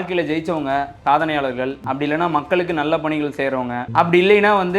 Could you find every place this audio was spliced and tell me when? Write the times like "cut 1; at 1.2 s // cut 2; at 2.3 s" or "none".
cut 1; at 0.9 s // cut 2; at 1.8 s // cut 3; at 3.8 s